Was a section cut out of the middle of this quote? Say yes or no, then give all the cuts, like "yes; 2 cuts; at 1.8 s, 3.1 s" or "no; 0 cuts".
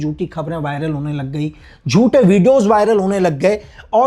no; 0 cuts